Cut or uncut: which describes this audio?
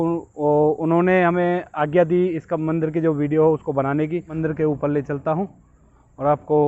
cut